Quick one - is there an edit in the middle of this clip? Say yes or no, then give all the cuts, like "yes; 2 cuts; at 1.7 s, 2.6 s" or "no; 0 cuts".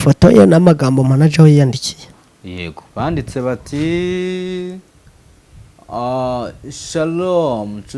no; 0 cuts